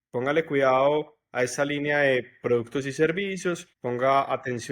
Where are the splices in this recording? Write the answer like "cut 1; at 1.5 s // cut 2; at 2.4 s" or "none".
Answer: cut 1; at 3.7 s